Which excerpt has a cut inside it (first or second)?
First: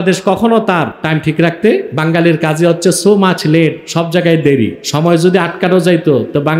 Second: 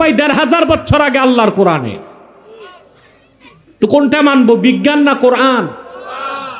first